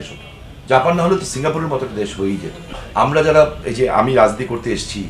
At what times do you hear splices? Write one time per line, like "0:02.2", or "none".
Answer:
0:02.6